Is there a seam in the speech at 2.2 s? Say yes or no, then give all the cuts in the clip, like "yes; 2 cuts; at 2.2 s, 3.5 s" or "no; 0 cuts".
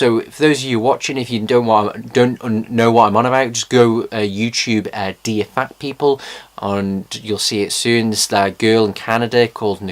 no; 1 cut; at 8.3 s